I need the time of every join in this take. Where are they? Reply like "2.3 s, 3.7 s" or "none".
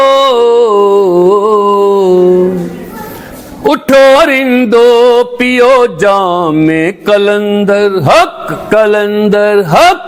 none